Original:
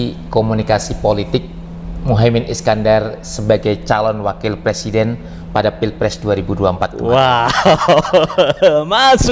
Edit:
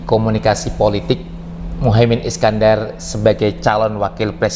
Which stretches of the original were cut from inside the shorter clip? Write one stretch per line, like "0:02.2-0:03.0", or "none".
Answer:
none